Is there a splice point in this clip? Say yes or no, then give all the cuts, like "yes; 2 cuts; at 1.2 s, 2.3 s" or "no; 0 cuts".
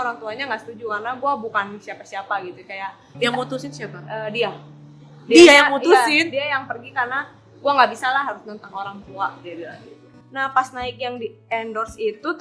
yes; 1 cut; at 10.1 s